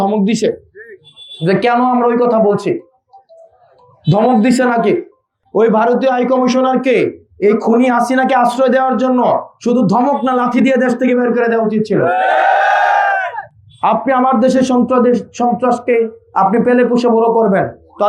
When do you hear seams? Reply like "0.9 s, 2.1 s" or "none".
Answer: none